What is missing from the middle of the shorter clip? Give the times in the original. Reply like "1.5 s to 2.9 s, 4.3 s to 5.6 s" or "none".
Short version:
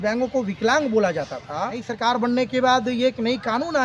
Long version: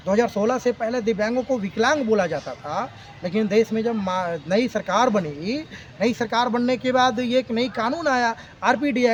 3.0 s to 6.2 s